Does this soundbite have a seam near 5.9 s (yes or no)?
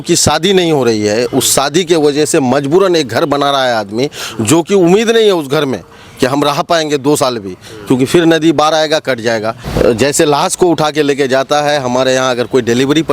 no